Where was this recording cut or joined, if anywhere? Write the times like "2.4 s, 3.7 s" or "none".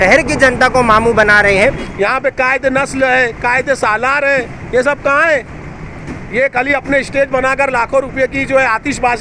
1.9 s